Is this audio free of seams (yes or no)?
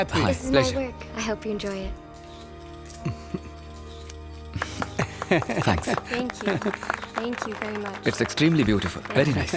yes